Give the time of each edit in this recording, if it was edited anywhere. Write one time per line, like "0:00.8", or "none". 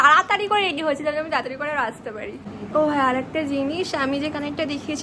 0:02.5